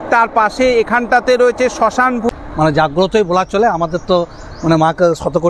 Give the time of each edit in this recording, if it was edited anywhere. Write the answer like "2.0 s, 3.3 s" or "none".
2.3 s

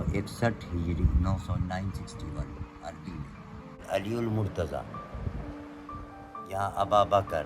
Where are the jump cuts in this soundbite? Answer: 3.7 s

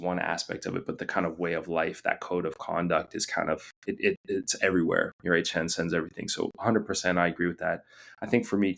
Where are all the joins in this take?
none

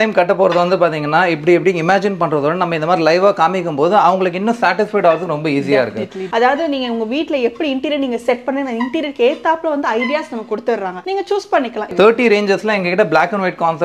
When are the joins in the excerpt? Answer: none

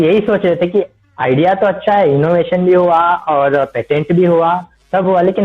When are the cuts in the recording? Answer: none

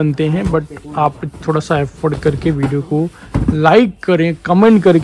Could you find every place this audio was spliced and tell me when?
none

